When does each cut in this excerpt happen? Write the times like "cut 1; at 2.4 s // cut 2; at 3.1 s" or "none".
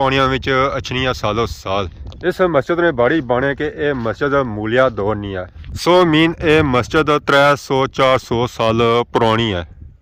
none